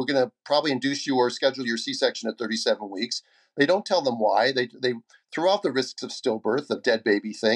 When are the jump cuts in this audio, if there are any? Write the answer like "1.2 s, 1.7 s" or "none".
none